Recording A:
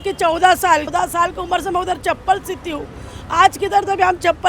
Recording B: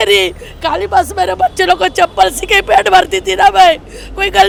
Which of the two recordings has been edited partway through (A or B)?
A